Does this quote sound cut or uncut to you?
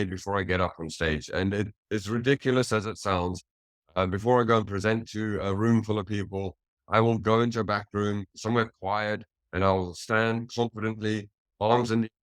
uncut